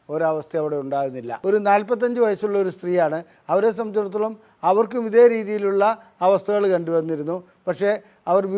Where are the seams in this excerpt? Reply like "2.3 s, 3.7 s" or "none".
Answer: 1.3 s